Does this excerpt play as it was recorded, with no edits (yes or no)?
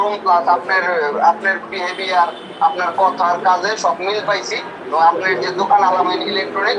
yes